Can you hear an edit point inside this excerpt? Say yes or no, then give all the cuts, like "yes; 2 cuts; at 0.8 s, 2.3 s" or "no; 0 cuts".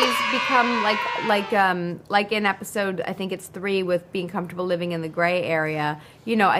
no; 0 cuts